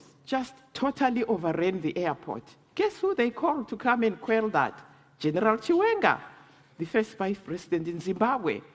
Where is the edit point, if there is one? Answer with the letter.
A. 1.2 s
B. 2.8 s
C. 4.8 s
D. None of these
D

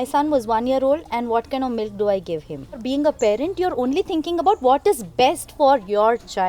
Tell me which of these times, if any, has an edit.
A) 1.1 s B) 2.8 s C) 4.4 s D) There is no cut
B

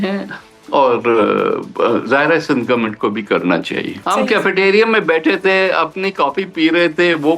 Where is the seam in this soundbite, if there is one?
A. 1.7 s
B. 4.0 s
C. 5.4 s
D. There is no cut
B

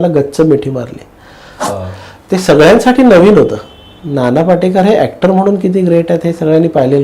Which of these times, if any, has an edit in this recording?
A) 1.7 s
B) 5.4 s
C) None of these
A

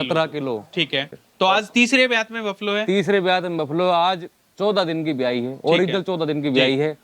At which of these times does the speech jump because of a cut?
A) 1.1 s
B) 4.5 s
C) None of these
A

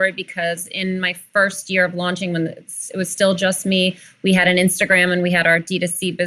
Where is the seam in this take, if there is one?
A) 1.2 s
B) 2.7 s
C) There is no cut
A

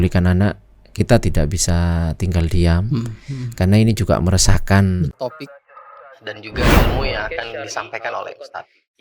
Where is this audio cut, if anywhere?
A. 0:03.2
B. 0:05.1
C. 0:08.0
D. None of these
B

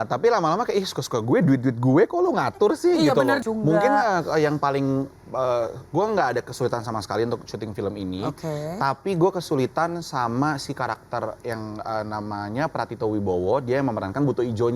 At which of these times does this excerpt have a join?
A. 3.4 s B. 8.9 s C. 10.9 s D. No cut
A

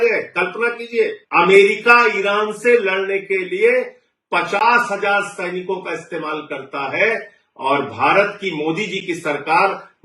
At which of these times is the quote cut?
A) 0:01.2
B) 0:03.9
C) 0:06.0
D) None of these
A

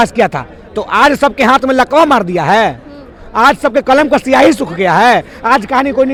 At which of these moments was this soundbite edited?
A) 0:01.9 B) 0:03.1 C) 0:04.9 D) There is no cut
D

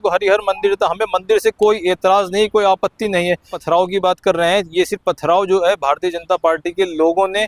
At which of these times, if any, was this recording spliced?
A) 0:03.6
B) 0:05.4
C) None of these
A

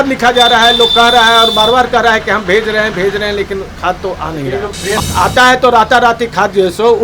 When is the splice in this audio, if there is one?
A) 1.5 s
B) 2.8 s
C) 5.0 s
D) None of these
C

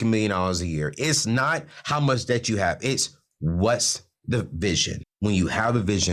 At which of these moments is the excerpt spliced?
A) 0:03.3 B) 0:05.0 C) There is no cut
B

